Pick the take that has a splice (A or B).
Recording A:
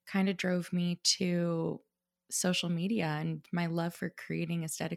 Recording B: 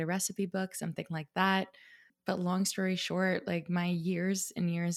B